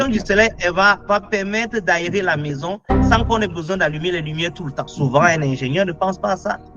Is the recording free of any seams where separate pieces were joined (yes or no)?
no